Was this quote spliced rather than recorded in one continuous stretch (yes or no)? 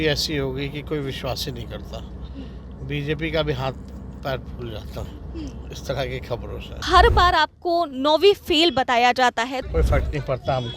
yes